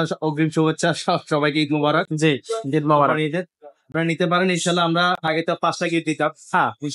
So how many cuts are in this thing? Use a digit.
0